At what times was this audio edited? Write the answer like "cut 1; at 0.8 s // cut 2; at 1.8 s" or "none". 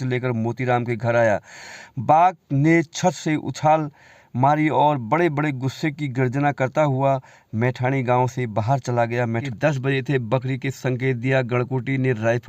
cut 1; at 9.5 s